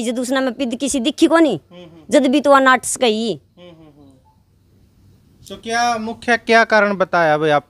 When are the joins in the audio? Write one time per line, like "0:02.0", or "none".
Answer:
none